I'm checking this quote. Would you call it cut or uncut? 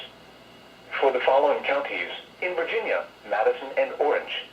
cut